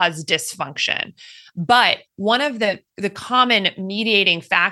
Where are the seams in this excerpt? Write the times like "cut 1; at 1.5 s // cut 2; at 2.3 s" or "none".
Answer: cut 1; at 1.4 s